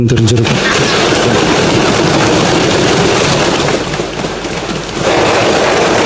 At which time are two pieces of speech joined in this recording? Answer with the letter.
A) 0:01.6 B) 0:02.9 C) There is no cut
C